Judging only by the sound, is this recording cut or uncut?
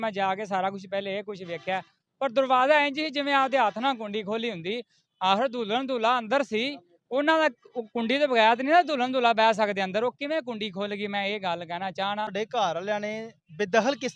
cut